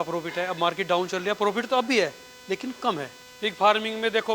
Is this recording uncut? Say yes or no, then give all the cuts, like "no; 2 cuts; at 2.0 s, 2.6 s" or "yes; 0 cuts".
no; 1 cut; at 3.2 s